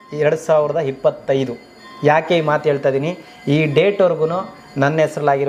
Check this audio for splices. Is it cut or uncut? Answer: uncut